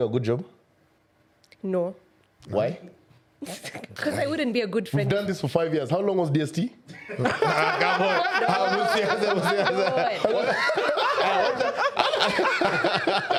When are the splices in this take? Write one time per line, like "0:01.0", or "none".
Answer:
none